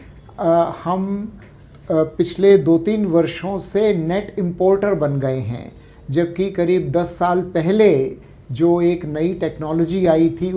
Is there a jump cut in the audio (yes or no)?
no